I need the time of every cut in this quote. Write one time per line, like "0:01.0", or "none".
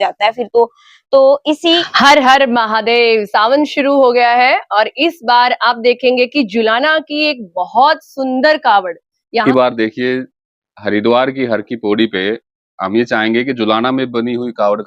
0:01.9
0:09.4

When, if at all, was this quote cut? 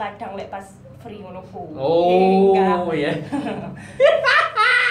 none

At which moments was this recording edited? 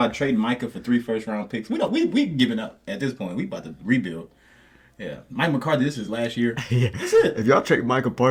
none

